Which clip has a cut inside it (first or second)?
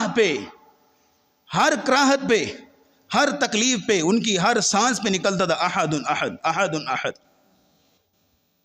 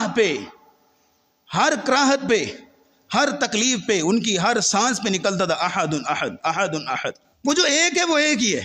second